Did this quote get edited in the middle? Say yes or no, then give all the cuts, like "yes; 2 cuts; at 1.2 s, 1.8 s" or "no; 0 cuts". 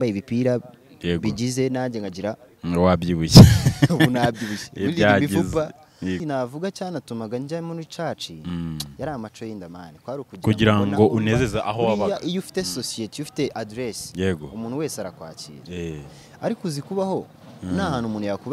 yes; 1 cut; at 6.2 s